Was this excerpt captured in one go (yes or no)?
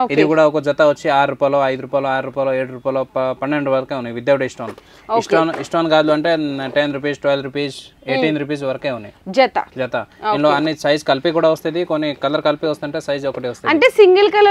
yes